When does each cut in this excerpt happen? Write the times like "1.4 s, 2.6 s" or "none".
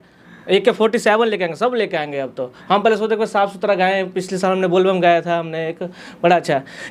none